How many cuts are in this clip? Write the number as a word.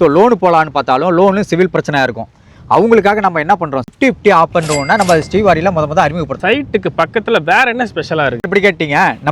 three